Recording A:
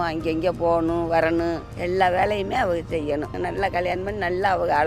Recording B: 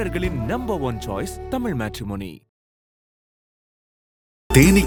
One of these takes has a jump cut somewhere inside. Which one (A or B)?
A